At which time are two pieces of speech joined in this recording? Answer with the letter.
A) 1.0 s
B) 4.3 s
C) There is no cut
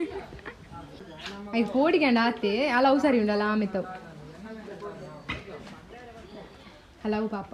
A